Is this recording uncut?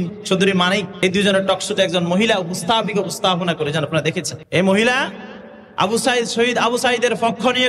no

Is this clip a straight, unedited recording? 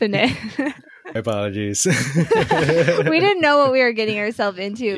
no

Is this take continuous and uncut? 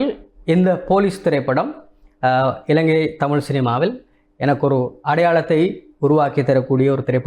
yes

